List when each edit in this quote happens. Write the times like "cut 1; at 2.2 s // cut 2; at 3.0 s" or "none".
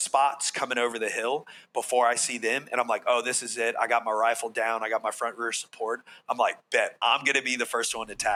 none